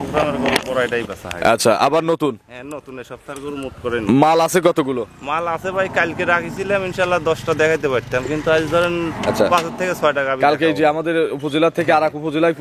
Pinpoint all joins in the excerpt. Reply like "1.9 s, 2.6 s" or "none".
none